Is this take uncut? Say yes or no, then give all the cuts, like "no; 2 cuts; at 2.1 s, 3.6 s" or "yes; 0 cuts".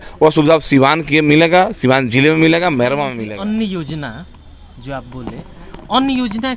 no; 1 cut; at 3.1 s